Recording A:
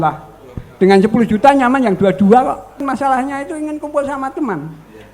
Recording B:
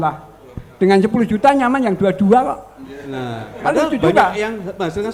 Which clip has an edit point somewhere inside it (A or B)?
A